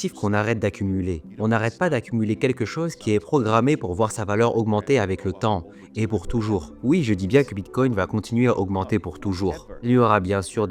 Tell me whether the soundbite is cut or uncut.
uncut